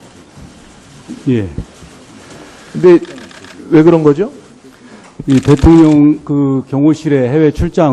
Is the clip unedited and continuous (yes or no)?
no